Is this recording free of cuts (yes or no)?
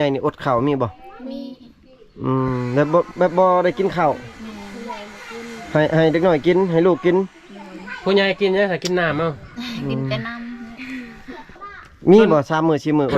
no